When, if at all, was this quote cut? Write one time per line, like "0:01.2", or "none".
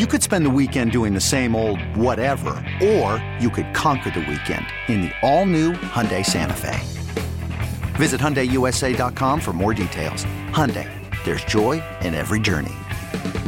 none